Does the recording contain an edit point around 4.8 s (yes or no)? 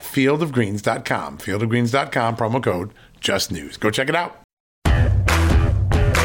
yes